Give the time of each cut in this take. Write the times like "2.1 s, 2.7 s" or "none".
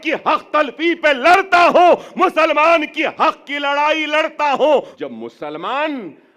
4.9 s